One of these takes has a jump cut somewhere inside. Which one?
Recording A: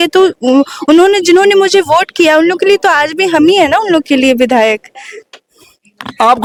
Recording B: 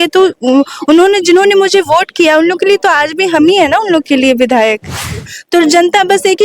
B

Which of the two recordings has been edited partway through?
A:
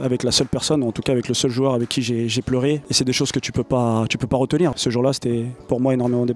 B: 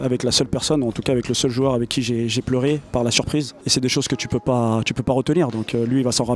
A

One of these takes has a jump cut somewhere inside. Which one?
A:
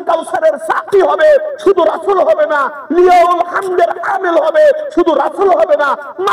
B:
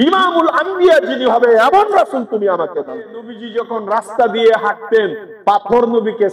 B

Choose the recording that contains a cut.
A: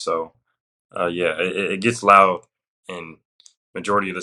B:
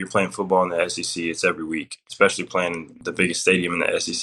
B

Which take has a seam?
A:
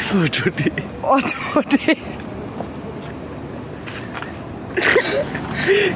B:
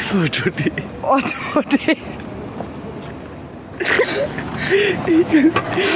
B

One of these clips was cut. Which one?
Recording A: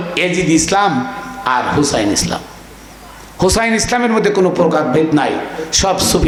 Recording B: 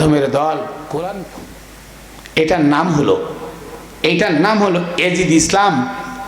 B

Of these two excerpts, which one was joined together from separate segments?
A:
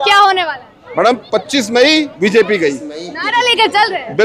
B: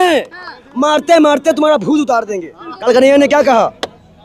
B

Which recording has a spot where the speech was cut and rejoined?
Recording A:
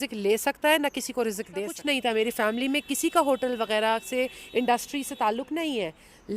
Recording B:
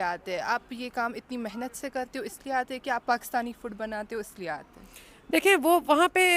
A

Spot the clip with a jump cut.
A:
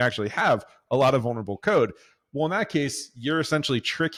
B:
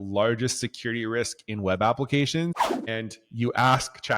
B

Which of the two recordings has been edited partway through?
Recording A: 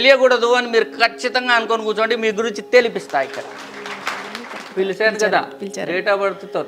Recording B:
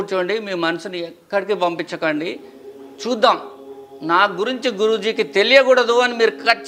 A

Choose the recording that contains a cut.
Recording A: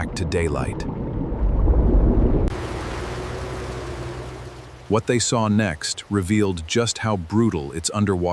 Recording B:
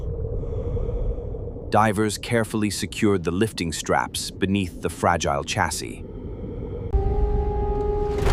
A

